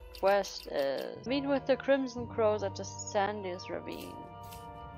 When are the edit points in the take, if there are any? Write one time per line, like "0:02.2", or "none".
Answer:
0:01.2

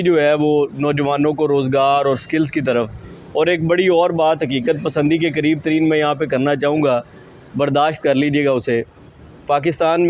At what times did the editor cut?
none

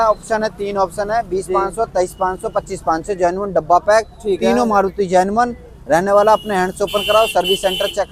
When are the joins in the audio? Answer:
none

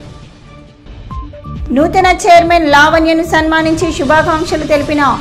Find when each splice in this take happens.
0:01.5

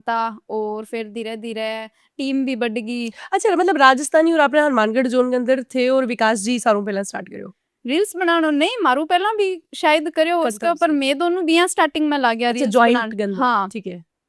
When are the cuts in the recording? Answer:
none

